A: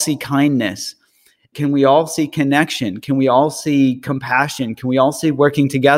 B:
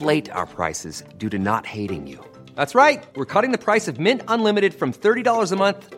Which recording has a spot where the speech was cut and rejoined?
A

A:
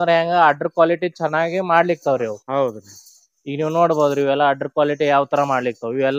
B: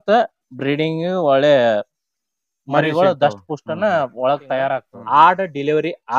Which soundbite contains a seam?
B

